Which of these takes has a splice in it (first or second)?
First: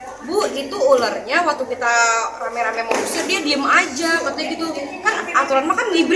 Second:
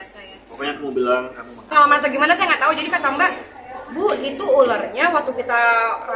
second